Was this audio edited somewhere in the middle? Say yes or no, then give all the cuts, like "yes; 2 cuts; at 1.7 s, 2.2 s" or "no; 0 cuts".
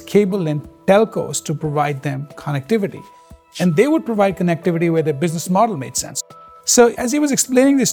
yes; 1 cut; at 7.0 s